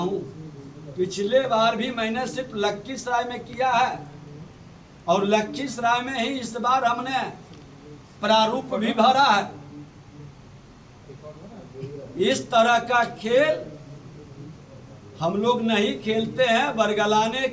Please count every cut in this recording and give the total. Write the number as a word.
zero